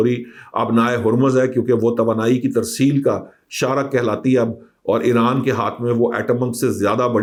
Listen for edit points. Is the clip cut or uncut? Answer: uncut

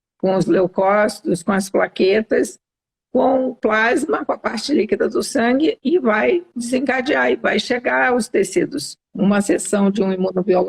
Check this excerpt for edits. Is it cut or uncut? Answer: cut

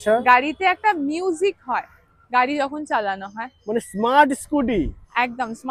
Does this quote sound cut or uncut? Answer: uncut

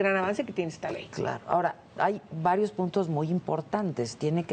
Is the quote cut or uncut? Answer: uncut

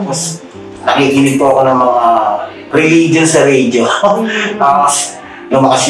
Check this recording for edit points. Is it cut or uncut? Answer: uncut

